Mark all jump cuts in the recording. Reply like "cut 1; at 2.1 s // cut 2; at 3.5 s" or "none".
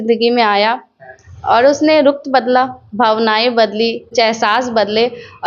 cut 1; at 4.1 s